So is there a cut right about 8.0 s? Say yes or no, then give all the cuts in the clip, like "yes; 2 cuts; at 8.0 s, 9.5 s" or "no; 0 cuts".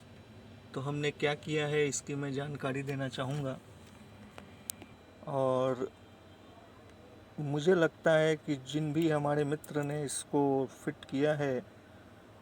no; 1 cut; at 4.9 s